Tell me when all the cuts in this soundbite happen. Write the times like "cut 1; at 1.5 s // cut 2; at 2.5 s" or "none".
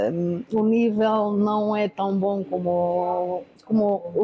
none